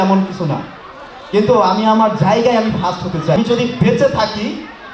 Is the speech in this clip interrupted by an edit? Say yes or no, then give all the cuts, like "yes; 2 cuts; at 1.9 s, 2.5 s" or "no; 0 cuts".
yes; 1 cut; at 3.4 s